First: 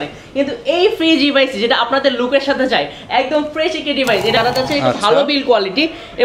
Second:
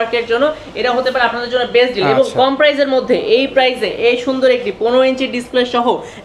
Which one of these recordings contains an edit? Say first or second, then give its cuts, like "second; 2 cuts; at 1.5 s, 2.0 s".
first; 1 cut; at 4.4 s